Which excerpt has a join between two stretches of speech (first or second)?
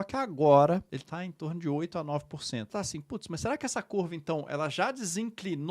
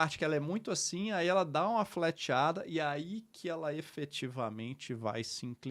first